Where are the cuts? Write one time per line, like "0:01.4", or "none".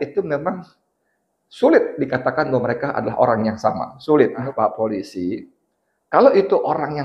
0:04.4